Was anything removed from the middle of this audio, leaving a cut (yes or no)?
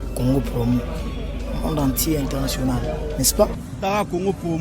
yes